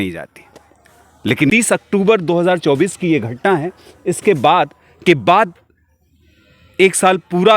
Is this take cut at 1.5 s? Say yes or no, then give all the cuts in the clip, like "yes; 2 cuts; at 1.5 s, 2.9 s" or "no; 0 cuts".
yes; 1 cut; at 1.5 s